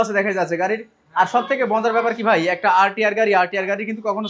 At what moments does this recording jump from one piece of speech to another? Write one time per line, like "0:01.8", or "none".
none